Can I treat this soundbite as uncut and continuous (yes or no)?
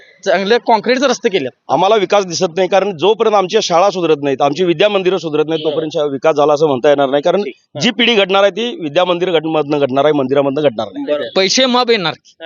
no